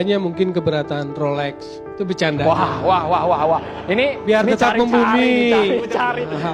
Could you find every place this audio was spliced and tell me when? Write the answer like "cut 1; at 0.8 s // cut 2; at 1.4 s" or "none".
none